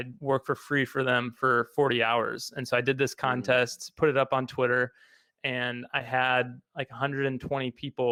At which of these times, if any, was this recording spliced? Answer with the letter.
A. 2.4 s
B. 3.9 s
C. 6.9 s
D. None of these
D